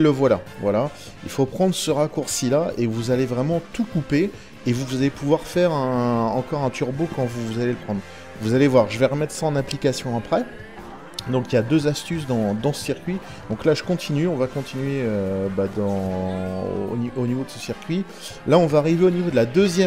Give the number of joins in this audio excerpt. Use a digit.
1